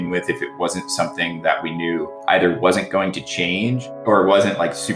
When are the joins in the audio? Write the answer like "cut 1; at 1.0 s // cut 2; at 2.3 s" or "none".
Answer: cut 1; at 2.1 s // cut 2; at 3.8 s